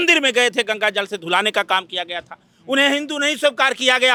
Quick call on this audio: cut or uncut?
uncut